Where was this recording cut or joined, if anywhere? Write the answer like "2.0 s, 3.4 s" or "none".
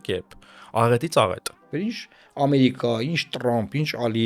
1.7 s